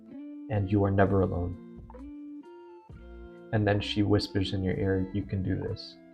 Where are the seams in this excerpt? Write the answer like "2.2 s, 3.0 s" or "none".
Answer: 1.7 s, 3.1 s

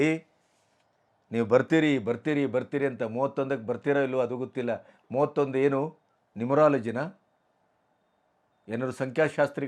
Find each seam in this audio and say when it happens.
none

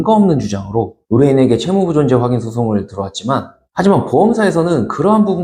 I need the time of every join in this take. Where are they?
3.6 s

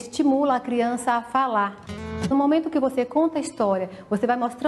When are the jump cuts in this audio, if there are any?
2.3 s

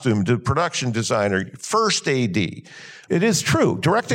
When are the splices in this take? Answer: 2.9 s

